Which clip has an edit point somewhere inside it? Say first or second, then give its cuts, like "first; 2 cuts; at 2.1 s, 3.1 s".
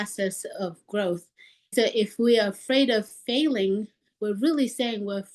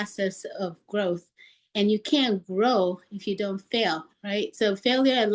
first; 1 cut; at 1.7 s